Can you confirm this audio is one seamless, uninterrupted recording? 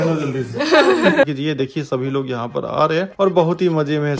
no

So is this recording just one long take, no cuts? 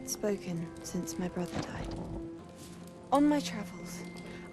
no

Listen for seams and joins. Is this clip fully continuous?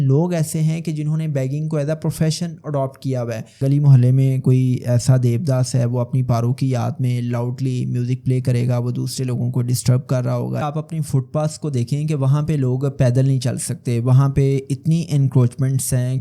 no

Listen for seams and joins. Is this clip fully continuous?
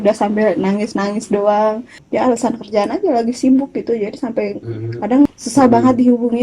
no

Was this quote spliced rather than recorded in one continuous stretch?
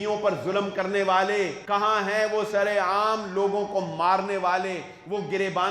yes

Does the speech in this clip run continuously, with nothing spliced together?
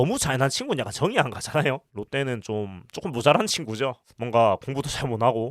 no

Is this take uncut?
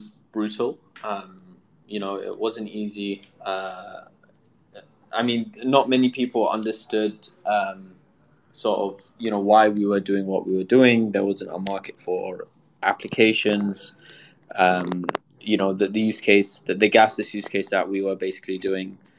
yes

